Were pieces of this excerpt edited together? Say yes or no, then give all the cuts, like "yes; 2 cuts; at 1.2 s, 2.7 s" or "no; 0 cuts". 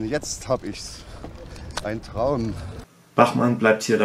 no; 0 cuts